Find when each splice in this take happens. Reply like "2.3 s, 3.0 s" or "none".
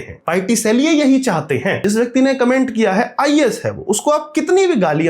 1.8 s